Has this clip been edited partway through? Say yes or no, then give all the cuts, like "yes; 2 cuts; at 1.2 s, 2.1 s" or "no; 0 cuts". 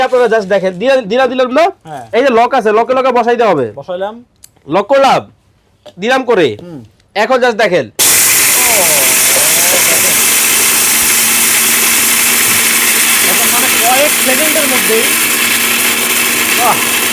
no; 0 cuts